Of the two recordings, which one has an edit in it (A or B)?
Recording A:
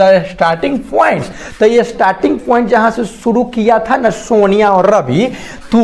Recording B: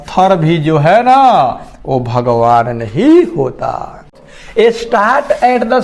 B